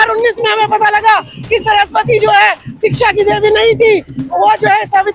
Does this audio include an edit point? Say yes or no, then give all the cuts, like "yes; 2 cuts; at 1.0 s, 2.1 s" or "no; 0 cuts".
no; 0 cuts